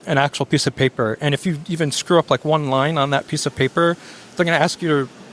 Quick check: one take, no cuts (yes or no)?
yes